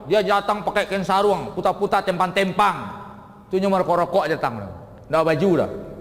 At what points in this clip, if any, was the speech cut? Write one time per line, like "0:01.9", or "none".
none